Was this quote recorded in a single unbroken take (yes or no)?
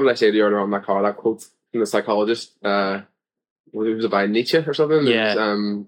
yes